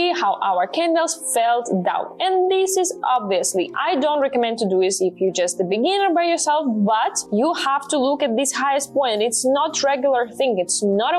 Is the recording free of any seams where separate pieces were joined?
no; 2 cuts; at 3.7 s, 7.1 s

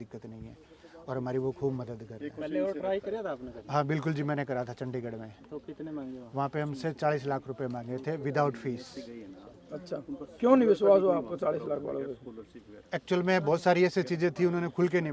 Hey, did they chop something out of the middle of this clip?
no; 0 cuts

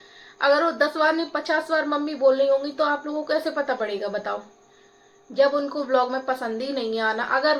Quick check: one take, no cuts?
yes; 0 cuts

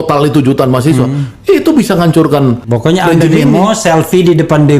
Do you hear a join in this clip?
yes; 1 cut; at 2.7 s

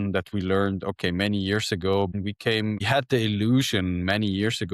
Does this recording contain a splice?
no; 0 cuts

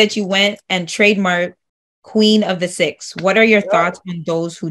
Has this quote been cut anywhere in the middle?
yes; 1 cut; at 3.0 s

